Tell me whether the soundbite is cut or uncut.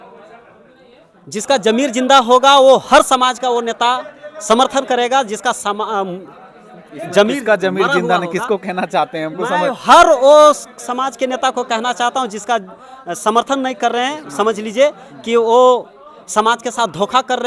uncut